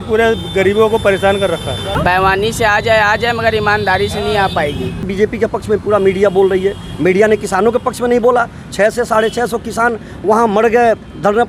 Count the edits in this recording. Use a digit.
2